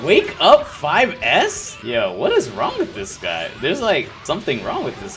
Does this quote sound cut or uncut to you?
cut